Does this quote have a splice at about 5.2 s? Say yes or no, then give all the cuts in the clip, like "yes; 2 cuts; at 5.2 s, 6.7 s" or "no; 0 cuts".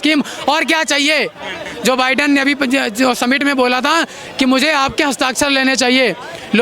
no; 1 cut; at 1.6 s